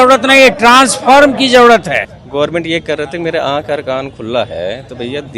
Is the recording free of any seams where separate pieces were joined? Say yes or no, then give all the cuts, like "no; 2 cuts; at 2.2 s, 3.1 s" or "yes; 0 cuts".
no; 1 cut; at 2.1 s